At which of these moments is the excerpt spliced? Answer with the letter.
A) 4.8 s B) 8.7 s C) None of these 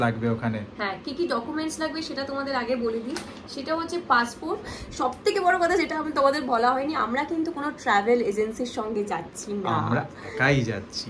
A